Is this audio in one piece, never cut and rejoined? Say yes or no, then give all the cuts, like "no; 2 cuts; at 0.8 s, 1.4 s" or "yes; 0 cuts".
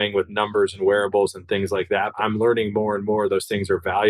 no; 1 cut; at 2.1 s